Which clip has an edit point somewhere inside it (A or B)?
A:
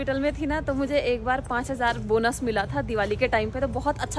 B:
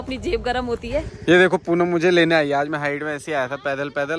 B